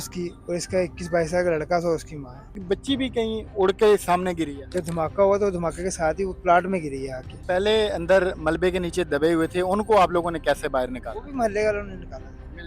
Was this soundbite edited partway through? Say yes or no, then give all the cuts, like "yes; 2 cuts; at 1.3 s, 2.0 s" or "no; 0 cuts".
yes; 3 cuts; at 2.6 s, 4.6 s, 7.4 s